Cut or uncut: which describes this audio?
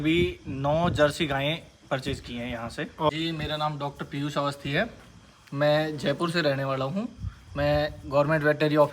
cut